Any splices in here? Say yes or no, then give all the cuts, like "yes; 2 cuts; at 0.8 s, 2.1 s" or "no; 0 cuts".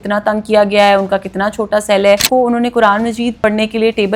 yes; 2 cuts; at 2.3 s, 3.4 s